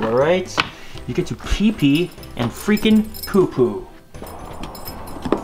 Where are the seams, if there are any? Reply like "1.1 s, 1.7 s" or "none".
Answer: 4.3 s